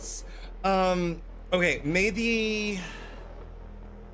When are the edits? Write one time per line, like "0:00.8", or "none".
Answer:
0:03.2

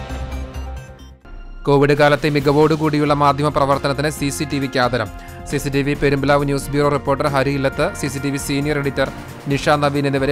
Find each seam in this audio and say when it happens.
0:01.1

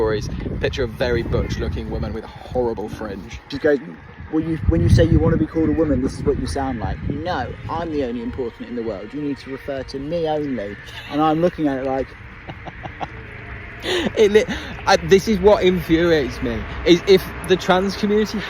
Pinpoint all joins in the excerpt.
0:03.4

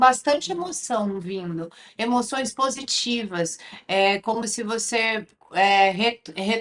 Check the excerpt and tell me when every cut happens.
none

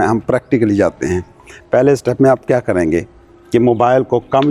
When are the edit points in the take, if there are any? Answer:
none

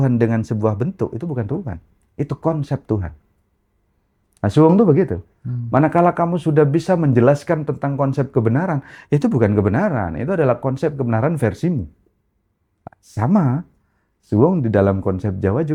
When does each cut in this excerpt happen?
none

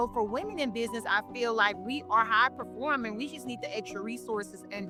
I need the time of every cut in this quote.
none

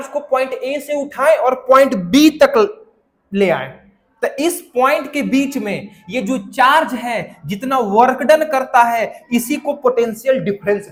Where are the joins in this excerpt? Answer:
none

